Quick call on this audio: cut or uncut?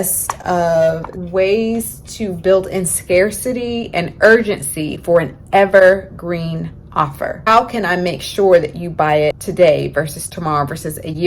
cut